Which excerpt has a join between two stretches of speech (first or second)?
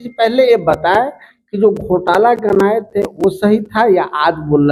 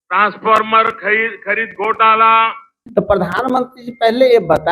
second